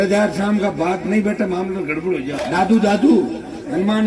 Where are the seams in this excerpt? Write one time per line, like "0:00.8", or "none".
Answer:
0:02.3